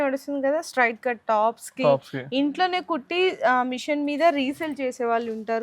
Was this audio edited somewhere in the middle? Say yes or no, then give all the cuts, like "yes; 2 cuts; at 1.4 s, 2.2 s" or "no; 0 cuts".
no; 0 cuts